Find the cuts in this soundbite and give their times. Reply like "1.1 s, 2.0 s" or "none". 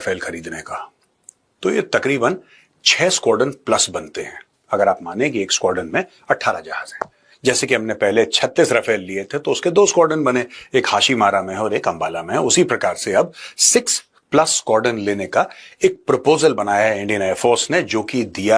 none